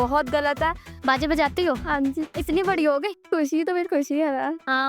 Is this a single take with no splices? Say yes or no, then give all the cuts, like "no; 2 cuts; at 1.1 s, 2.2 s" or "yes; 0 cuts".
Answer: no; 2 cuts; at 0.9 s, 3.2 s